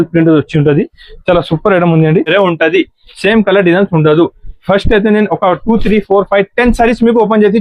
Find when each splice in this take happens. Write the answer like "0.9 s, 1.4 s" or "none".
2.3 s